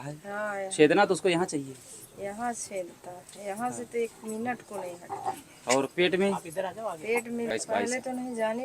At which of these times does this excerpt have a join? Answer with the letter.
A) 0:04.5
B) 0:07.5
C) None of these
B